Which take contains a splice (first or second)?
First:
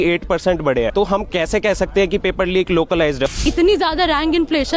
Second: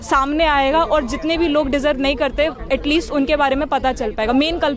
first